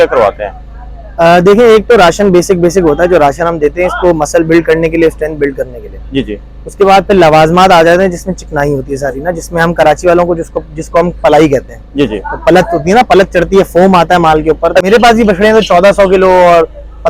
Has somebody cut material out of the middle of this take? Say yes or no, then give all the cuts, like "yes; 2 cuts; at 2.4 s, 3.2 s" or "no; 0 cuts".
yes; 1 cut; at 14.9 s